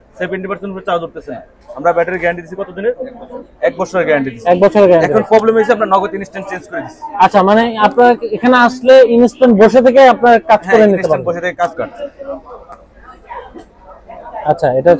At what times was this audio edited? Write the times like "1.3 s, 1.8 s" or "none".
11.7 s